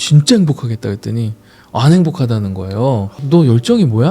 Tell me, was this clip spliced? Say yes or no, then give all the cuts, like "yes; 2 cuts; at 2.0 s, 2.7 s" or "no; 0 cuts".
yes; 1 cut; at 3.2 s